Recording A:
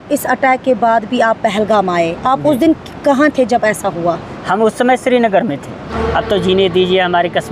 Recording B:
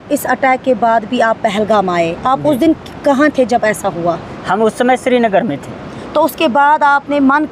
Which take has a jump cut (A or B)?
A